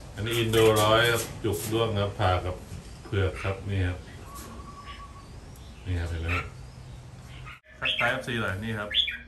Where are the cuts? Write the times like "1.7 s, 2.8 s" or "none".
7.6 s